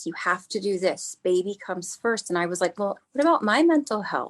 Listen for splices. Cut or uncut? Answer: cut